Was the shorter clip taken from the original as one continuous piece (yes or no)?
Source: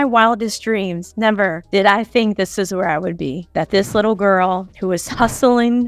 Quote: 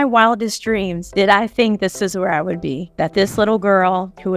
no